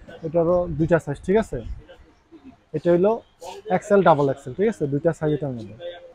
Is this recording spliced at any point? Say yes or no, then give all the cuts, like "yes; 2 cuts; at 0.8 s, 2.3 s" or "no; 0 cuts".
no; 0 cuts